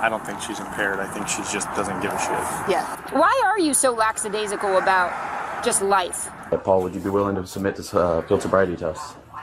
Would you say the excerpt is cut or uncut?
cut